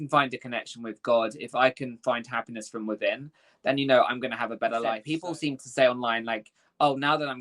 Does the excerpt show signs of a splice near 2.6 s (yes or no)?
no